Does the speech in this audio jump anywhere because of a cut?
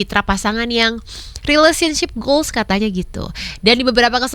no; 0 cuts

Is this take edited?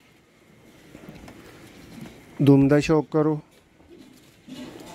no; 0 cuts

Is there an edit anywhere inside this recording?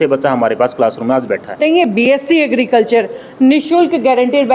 yes; 1 cut; at 1.6 s

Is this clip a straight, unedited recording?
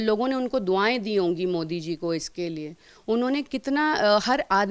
yes; 0 cuts

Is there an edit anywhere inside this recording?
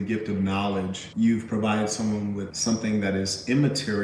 yes; 2 cuts; at 1.0 s, 2.5 s

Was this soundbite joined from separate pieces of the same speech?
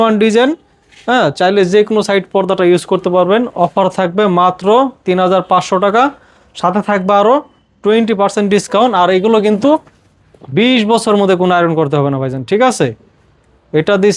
no; 0 cuts

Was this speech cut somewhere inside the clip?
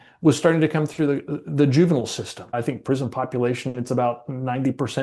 yes; 1 cut; at 2.5 s

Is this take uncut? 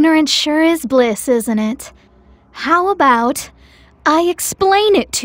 yes; 0 cuts

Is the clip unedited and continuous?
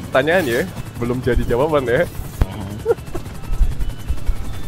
yes; 0 cuts

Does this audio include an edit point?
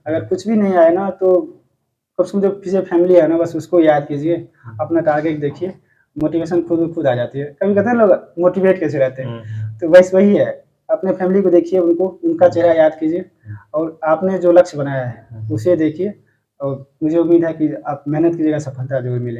no; 0 cuts

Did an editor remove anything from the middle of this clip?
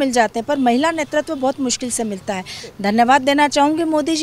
yes; 1 cut; at 2.6 s

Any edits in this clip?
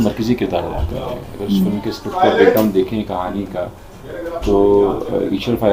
no; 0 cuts

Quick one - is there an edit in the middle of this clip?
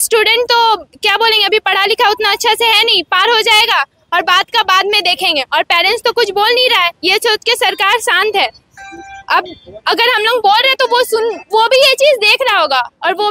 no; 0 cuts

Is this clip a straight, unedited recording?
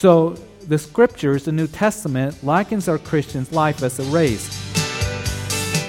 no; 1 cut; at 4.6 s

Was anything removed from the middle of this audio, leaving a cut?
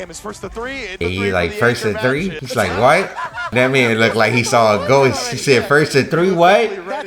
yes; 1 cut; at 1.0 s

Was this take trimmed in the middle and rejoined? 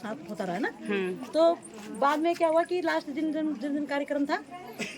no; 0 cuts

